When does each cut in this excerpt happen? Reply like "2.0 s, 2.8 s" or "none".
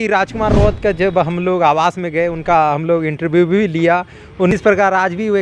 4.5 s